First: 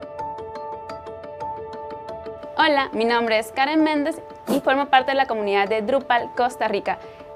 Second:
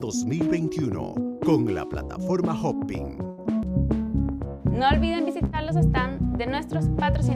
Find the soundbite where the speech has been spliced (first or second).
second